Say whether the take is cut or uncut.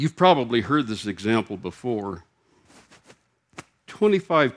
uncut